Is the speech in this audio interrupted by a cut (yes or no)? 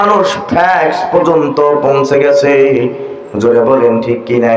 no